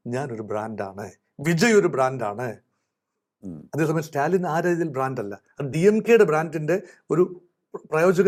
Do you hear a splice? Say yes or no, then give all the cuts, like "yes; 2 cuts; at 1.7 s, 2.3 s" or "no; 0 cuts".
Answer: no; 0 cuts